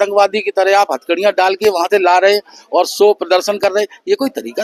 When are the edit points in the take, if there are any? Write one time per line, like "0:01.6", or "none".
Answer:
none